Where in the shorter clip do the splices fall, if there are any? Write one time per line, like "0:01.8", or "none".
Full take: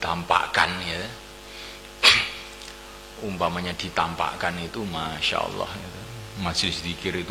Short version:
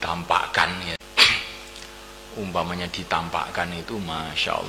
0:01.0